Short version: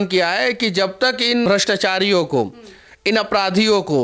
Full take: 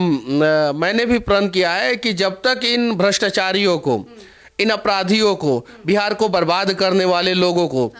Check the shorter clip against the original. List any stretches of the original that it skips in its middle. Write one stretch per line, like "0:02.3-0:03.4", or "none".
0:02.9-0:03.0